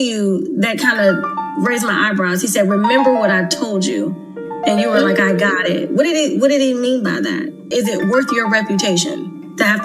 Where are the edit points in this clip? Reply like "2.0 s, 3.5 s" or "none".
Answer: 7.7 s